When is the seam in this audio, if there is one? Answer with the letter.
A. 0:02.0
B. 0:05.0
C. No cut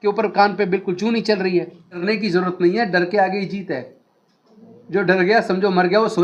A